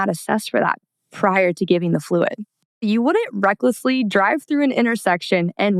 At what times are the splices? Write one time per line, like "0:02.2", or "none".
0:02.8